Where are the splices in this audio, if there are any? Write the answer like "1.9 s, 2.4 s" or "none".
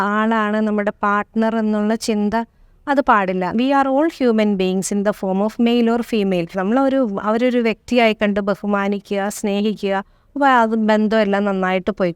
3.6 s, 6.6 s